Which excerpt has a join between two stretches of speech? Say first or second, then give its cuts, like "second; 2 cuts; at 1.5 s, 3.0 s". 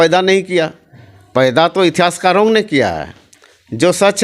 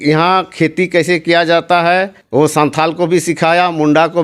second; 1 cut; at 2.2 s